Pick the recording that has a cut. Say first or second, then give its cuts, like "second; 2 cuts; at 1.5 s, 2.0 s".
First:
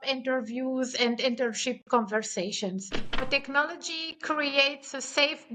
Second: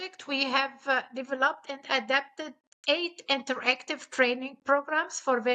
first; 1 cut; at 3.2 s